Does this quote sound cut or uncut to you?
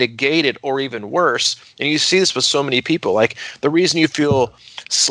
uncut